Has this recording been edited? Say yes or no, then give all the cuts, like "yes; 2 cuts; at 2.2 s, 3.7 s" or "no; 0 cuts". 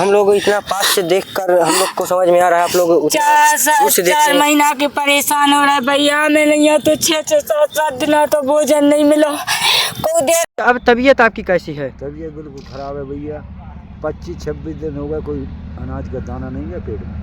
yes; 1 cut; at 10.4 s